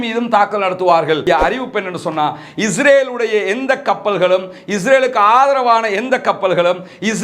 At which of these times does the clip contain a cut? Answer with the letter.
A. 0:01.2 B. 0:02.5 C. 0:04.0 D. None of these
A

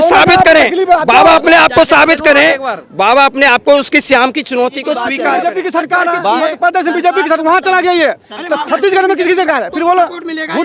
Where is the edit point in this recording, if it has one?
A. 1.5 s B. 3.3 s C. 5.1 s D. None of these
C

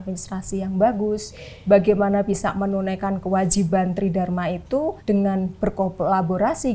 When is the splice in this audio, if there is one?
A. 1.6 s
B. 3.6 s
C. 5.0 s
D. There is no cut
C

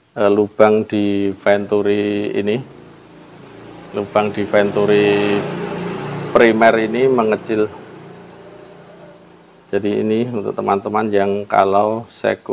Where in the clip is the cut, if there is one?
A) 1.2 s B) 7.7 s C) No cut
C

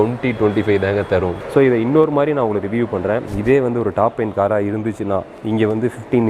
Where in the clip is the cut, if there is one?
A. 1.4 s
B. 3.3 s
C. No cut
A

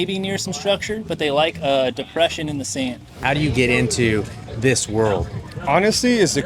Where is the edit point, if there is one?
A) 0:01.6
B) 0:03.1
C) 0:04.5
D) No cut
B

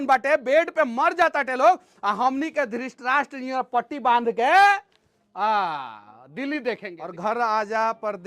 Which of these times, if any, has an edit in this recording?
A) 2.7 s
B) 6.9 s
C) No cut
B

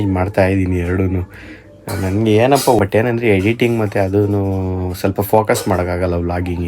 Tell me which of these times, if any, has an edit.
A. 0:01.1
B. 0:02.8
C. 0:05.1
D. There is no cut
B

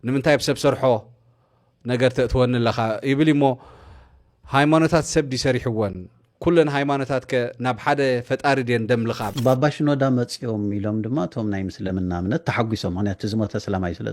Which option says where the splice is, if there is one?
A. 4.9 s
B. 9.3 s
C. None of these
B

